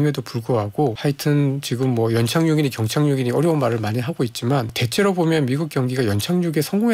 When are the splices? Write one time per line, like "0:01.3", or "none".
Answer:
0:01.0
0:04.8